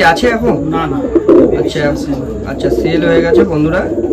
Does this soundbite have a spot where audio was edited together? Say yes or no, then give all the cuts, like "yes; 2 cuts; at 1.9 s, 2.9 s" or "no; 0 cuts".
no; 0 cuts